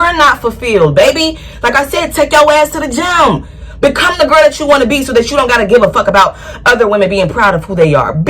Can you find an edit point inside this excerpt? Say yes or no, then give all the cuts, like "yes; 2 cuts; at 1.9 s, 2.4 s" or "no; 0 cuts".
no; 0 cuts